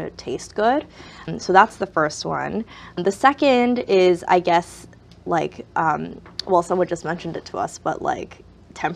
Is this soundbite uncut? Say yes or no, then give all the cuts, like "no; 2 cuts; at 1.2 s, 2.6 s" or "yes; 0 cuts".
no; 2 cuts; at 1.3 s, 3.0 s